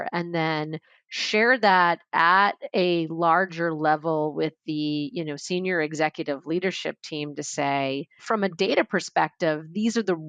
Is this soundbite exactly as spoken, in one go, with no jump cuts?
no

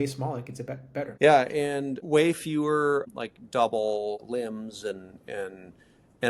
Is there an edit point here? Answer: yes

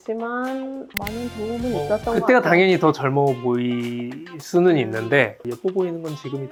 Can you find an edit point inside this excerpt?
no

